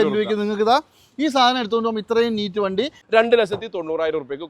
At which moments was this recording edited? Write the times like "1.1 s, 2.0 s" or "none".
3.0 s